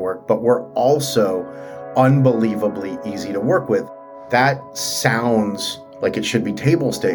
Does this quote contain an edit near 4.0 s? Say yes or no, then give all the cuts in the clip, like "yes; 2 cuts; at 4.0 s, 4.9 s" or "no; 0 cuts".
yes; 1 cut; at 4.0 s